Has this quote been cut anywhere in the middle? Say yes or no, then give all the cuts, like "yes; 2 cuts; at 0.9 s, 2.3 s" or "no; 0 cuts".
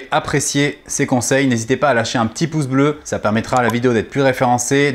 yes; 1 cut; at 3.0 s